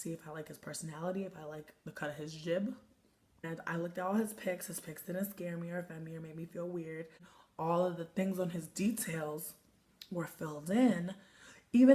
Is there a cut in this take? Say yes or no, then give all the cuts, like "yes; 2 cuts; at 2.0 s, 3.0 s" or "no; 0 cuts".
no; 0 cuts